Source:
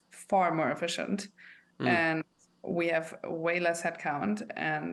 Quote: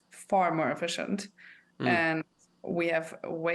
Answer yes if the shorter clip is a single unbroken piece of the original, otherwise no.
yes